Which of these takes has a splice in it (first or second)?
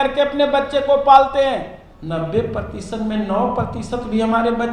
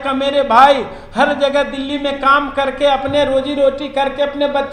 first